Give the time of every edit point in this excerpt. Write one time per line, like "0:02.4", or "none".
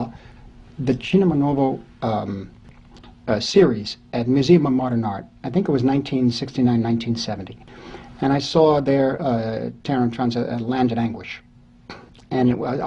0:02.5